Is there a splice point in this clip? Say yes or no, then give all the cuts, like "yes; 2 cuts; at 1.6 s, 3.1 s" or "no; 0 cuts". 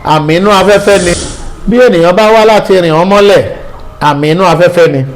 yes; 1 cut; at 1.2 s